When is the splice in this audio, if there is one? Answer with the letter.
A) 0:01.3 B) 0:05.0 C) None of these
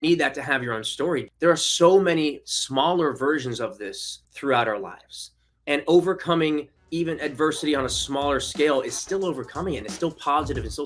A